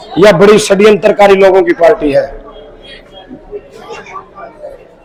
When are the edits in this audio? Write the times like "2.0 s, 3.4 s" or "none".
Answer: none